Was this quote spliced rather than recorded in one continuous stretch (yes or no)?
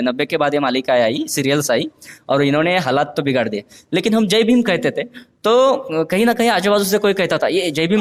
no